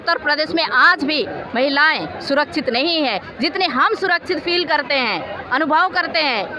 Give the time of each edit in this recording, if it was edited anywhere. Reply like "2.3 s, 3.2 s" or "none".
none

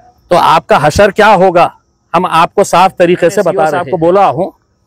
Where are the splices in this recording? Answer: 3.8 s

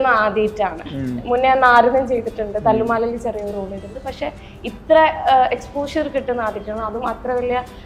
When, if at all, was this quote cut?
none

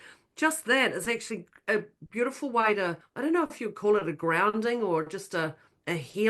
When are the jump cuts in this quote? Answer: 3.0 s

